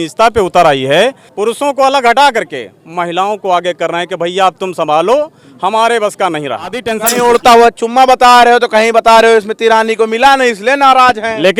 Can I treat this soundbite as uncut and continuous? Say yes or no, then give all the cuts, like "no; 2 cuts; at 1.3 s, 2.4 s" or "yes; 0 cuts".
no; 2 cuts; at 1.3 s, 7.0 s